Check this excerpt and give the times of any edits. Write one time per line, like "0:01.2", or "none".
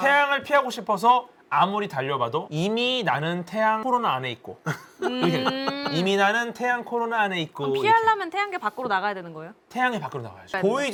none